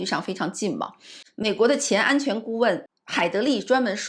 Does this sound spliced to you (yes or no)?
yes